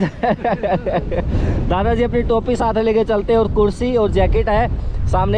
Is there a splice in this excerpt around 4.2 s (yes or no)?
no